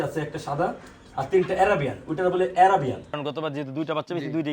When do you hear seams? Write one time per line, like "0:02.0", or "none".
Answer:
0:03.2